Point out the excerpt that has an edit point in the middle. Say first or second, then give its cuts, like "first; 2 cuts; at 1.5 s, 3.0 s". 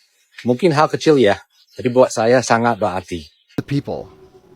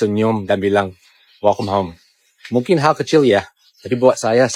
first; 1 cut; at 3.7 s